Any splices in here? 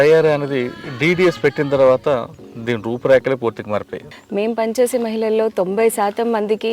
yes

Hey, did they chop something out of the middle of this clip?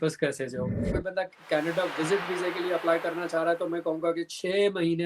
yes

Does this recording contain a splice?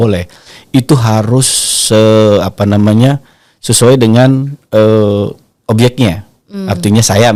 no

